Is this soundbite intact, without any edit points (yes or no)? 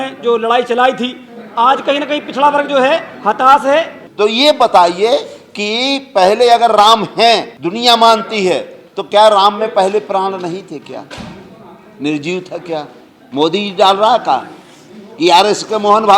no